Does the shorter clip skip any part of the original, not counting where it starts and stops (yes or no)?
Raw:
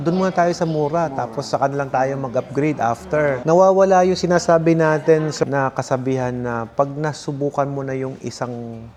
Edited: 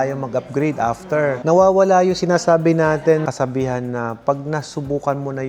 yes